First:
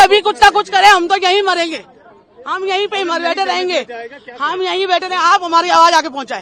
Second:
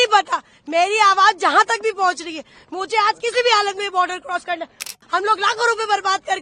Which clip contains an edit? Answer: second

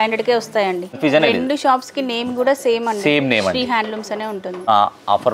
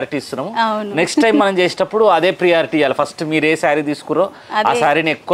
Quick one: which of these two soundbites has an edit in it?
first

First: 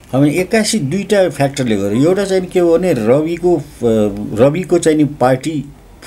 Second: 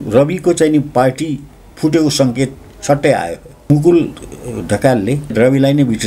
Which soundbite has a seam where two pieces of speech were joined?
second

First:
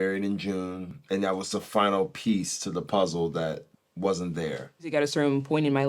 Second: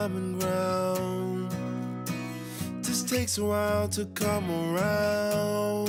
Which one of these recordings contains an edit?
first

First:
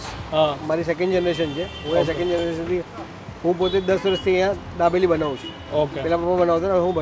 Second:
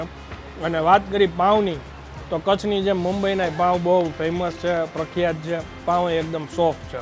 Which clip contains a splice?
second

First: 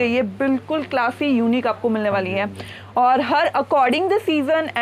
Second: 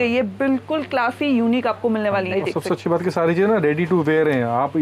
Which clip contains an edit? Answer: second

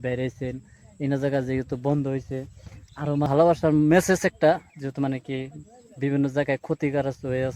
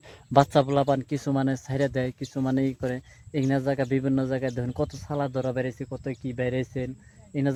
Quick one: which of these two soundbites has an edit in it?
first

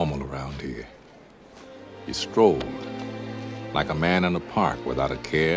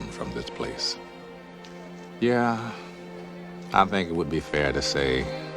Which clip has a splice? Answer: second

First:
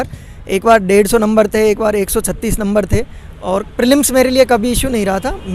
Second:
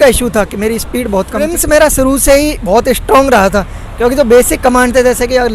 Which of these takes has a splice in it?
second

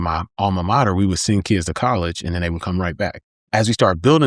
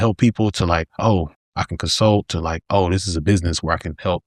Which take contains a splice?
first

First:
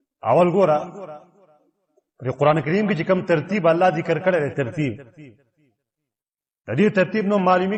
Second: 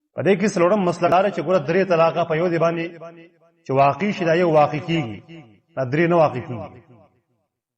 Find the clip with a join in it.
second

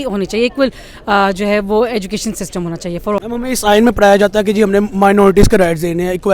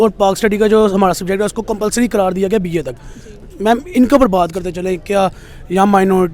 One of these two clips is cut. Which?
first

